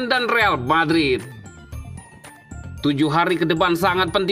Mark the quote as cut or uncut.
uncut